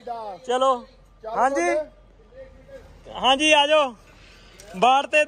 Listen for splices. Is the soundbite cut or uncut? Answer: uncut